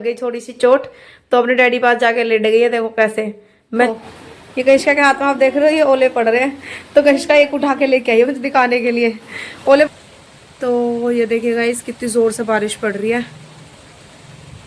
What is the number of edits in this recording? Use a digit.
2